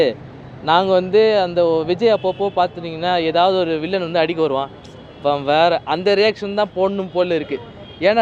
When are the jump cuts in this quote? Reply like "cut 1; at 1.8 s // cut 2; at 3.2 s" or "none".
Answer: none